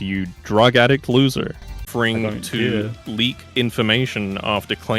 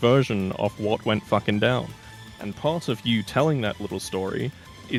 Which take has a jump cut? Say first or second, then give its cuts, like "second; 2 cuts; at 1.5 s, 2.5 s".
first; 1 cut; at 1.9 s